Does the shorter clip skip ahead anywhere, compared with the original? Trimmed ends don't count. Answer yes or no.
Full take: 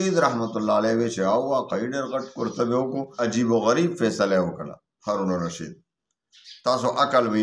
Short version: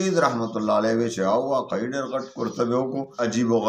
no